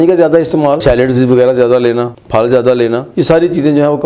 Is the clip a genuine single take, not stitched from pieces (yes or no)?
no